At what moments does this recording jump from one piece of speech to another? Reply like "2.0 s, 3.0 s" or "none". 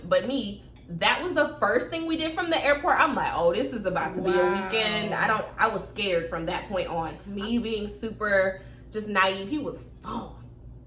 7.3 s